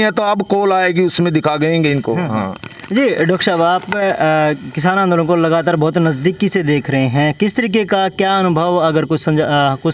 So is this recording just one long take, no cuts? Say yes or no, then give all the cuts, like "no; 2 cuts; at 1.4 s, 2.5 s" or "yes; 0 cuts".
yes; 0 cuts